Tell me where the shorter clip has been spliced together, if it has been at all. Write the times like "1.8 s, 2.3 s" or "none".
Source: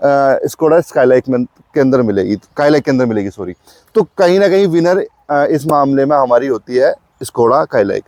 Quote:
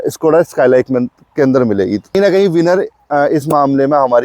2.1 s